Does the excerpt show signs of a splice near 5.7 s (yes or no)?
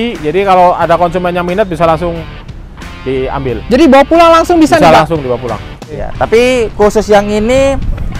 yes